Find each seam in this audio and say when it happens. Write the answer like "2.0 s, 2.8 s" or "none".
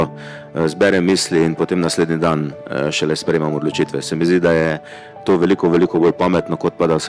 none